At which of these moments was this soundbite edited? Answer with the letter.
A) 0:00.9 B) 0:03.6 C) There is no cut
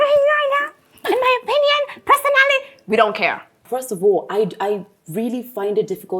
B